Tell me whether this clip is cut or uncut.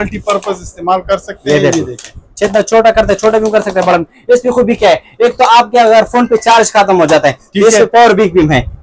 uncut